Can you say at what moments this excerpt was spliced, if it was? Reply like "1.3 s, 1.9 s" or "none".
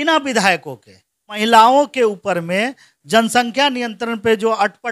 1.4 s